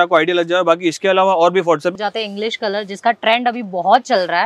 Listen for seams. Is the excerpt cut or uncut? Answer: cut